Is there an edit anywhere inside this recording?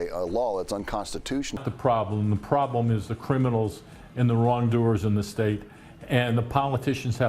yes; 1 cut; at 1.5 s

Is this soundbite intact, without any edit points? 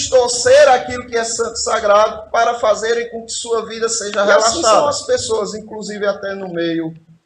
no; 1 cut; at 4.8 s

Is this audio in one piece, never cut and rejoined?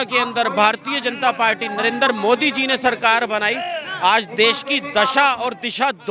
yes; 0 cuts

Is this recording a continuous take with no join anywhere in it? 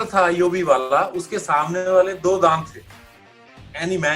yes; 0 cuts

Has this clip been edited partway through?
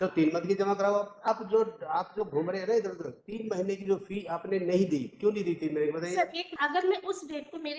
yes; 2 cuts; at 1.3 s, 6.6 s

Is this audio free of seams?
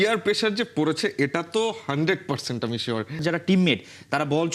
no; 1 cut; at 3.2 s

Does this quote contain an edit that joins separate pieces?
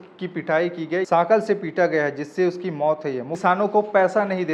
yes; 2 cuts; at 1.1 s, 3.4 s

